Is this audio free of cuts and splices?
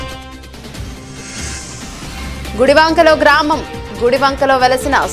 no; 1 cut; at 1.1 s

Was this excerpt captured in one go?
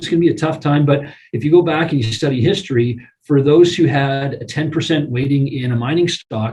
yes; 0 cuts

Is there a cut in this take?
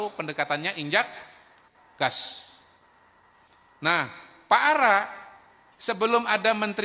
yes; 1 cut; at 3.2 s

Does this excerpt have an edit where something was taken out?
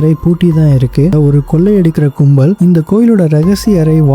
yes; 1 cut; at 1.1 s

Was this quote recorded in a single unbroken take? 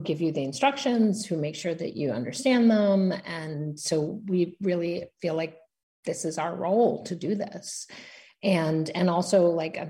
yes; 0 cuts

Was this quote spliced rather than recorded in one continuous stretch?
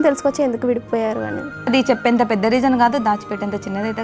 yes; 1 cut; at 1.7 s

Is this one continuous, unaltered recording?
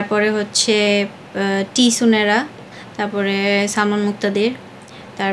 yes; 0 cuts

